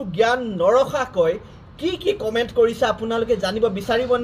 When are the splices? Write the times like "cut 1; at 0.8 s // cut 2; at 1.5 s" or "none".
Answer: none